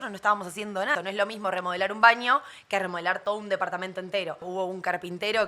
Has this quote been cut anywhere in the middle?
yes; 2 cuts; at 0.9 s, 4.5 s

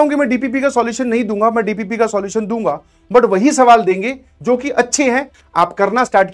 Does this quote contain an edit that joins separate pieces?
yes; 1 cut; at 5.4 s

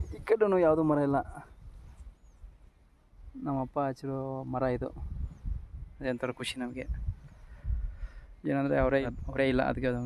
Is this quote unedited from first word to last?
no; 1 cut; at 9.0 s

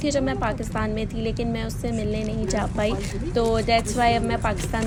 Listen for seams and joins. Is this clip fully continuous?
yes; 0 cuts

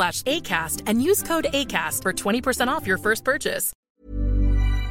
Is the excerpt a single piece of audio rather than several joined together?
no; 1 cut; at 3.8 s

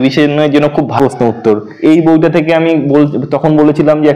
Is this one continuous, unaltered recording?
no; 1 cut; at 1.0 s

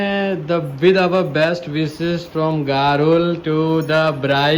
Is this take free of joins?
yes; 0 cuts

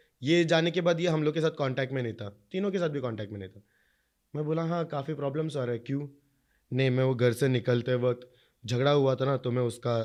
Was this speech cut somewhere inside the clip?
no; 0 cuts

